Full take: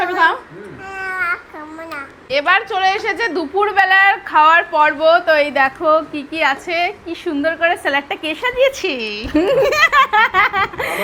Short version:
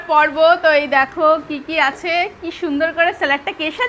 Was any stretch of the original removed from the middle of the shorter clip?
no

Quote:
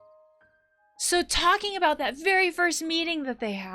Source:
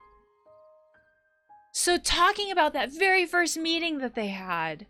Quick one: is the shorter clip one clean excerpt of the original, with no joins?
no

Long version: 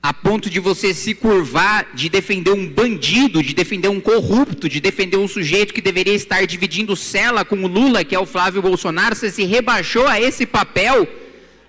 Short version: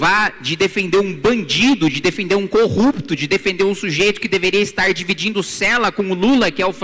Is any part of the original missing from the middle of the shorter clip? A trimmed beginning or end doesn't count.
no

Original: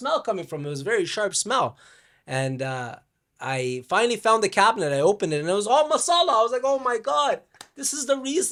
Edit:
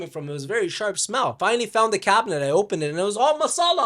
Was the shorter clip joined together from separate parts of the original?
yes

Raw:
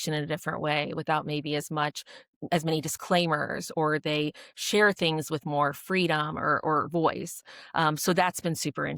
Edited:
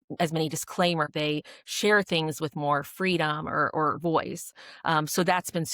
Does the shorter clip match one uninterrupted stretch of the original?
no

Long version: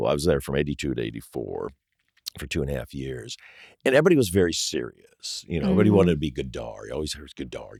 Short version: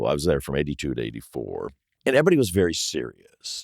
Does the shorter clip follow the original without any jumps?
no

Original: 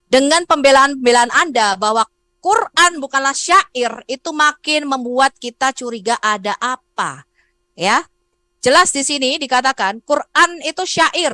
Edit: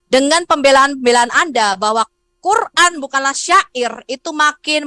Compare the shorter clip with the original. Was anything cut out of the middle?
no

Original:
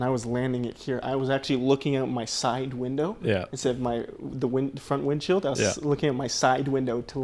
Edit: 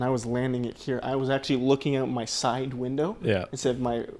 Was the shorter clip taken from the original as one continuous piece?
yes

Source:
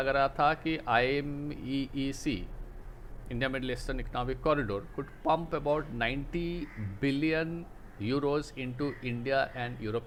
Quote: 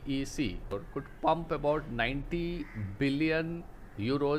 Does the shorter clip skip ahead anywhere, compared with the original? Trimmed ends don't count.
yes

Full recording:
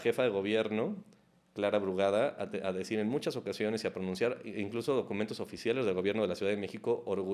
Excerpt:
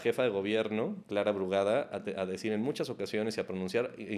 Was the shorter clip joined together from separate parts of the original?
yes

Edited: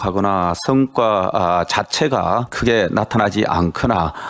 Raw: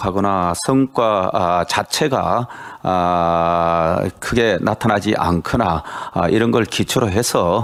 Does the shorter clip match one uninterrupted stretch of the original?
no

